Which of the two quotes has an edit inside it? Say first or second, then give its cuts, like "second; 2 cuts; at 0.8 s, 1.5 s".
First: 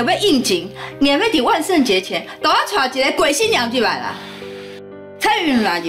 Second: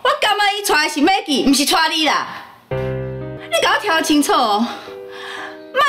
second; 1 cut; at 3.3 s